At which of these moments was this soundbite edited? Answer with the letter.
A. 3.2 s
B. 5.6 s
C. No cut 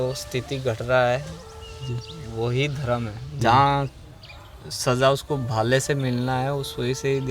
A